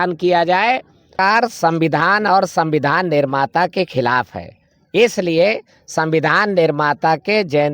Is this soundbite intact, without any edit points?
no; 1 cut; at 1.1 s

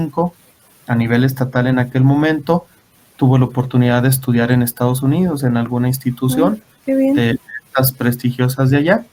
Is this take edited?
no; 0 cuts

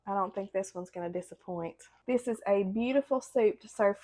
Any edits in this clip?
yes; 1 cut; at 1.9 s

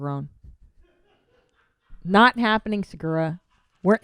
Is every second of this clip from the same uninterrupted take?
no; 1 cut; at 2.4 s

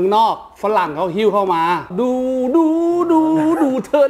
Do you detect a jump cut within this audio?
yes; 1 cut; at 1.9 s

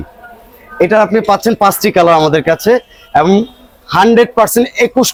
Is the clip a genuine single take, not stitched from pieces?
yes; 0 cuts

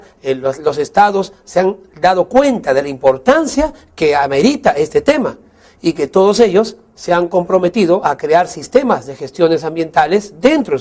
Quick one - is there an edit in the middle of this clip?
yes; 1 cut; at 2.3 s

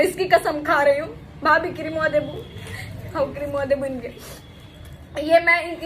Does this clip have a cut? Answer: no; 0 cuts

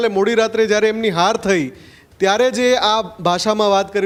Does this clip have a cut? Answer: no; 0 cuts

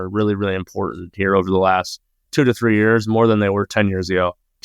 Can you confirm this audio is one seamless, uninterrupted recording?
yes; 0 cuts

